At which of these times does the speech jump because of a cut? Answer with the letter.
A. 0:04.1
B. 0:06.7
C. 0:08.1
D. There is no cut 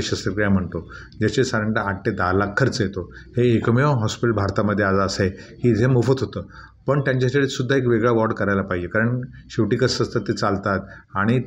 D